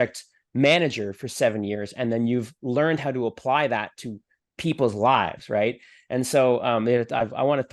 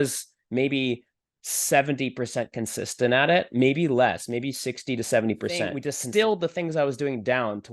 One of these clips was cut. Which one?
second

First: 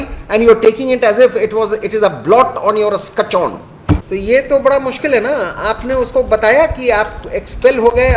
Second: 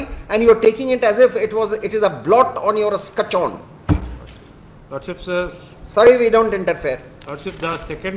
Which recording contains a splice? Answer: first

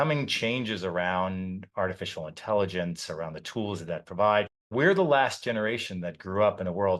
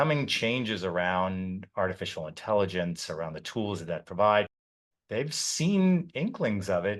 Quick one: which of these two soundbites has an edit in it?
first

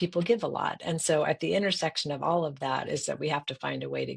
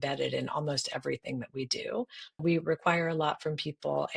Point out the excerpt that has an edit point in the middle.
second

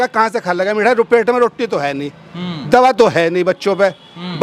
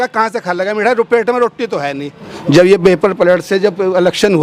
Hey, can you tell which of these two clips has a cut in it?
second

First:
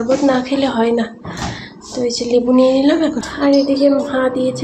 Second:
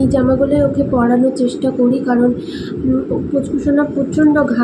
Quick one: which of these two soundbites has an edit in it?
first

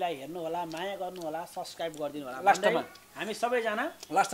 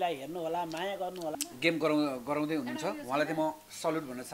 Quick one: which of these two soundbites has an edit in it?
second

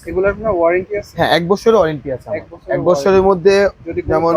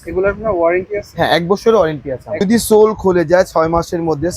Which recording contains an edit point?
second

